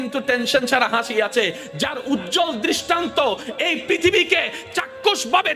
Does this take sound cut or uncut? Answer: uncut